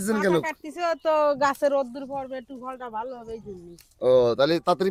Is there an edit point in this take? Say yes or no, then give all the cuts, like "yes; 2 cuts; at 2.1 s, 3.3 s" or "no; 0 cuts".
no; 0 cuts